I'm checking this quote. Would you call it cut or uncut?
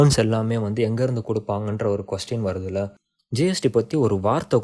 cut